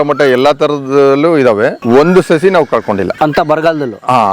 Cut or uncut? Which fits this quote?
cut